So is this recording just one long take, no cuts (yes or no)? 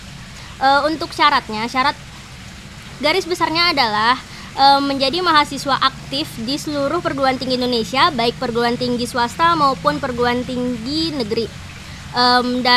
yes